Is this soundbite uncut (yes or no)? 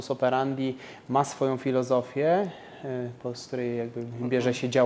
yes